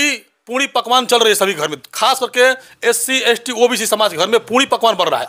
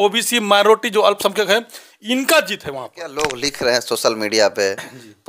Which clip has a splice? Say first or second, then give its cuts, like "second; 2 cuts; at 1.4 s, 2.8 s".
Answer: second; 1 cut; at 3.2 s